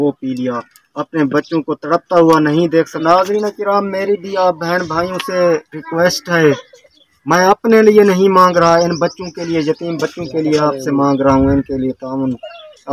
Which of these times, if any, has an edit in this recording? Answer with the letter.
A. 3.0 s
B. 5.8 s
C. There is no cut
A